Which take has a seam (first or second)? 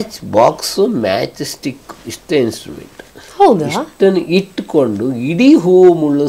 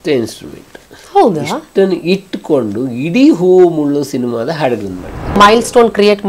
second